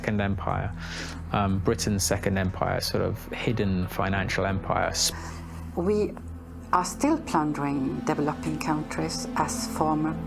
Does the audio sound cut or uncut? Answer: cut